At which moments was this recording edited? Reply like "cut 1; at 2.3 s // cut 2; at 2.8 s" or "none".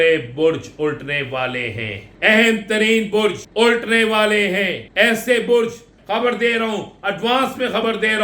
cut 1; at 2.0 s // cut 2; at 3.4 s // cut 3; at 4.8 s // cut 4; at 5.9 s